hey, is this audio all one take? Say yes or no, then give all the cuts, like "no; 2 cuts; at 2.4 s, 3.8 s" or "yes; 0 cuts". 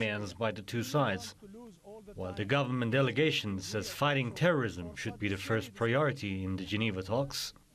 yes; 0 cuts